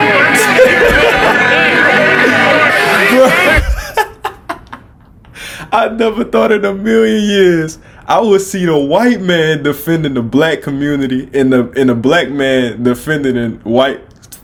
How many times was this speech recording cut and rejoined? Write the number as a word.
zero